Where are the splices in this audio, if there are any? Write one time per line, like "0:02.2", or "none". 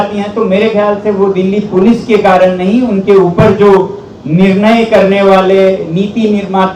none